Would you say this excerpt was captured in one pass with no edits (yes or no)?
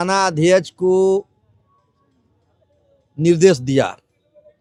yes